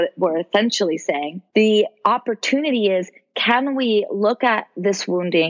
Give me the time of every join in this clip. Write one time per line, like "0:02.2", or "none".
0:01.4